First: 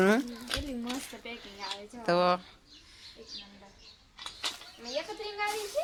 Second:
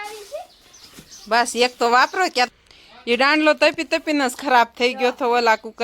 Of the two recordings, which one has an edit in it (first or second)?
second